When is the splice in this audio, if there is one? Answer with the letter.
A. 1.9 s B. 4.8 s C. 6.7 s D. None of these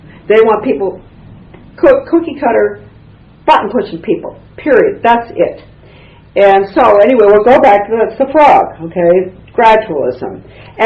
A